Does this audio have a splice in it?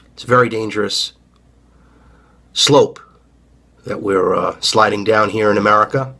yes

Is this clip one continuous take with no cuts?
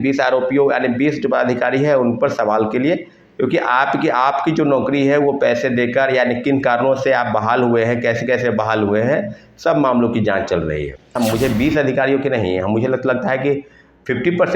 no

